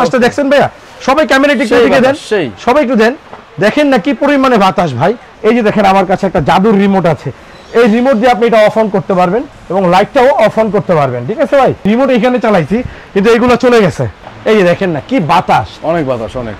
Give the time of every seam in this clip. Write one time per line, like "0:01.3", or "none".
0:05.3
0:09.6
0:11.9
0:14.3